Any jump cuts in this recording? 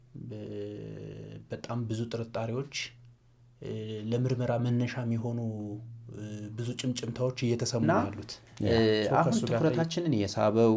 yes; 1 cut; at 8.0 s

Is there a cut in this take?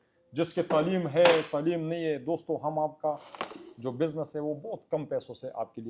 no; 0 cuts

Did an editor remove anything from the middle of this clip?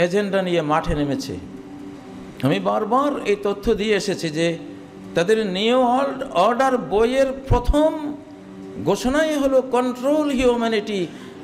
no; 0 cuts

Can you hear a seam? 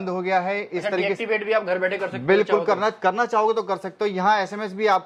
no; 0 cuts

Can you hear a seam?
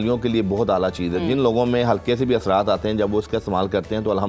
no; 0 cuts

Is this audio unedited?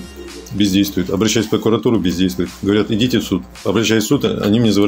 yes; 0 cuts

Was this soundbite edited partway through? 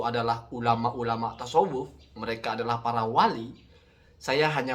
no; 0 cuts

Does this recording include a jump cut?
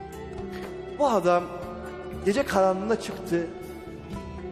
yes; 1 cut; at 1.0 s

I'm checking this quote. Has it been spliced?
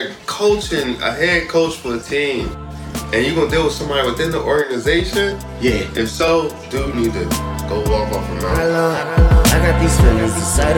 yes; 1 cut; at 8.5 s

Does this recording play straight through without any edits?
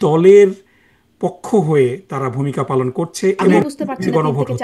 no; 1 cut; at 3.5 s

